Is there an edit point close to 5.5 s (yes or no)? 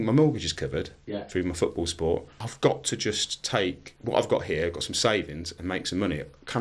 no